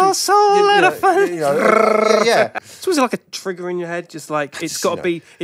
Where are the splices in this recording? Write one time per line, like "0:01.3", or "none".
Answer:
0:02.6